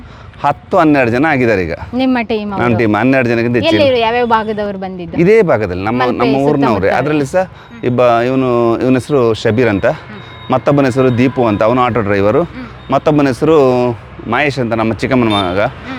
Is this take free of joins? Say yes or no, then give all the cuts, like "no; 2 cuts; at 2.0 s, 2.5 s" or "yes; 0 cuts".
yes; 0 cuts